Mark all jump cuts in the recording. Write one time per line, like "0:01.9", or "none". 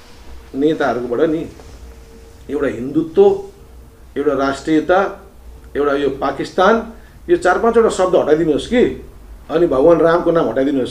none